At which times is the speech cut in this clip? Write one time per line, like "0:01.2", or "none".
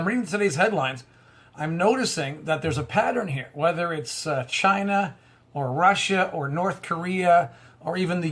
0:00.9